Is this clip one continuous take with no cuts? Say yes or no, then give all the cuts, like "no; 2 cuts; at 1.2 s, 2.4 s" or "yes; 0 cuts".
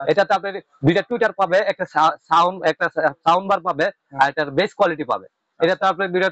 yes; 0 cuts